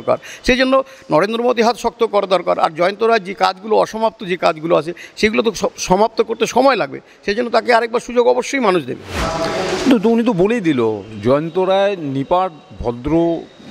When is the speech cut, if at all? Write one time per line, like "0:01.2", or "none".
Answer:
none